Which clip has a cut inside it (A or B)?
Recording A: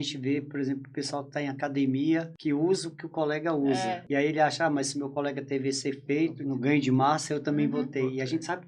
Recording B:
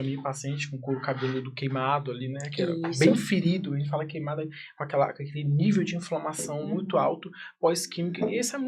A